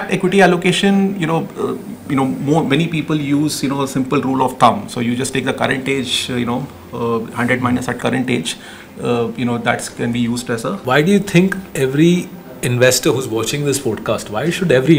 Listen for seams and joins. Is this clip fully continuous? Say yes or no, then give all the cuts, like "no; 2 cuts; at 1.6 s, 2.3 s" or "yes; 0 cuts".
no; 1 cut; at 10.8 s